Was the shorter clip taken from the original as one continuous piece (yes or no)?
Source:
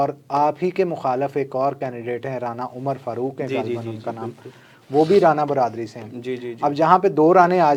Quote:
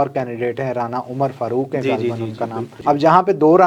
no